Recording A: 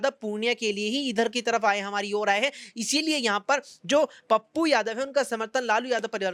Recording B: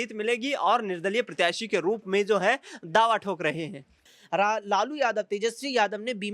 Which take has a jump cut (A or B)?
B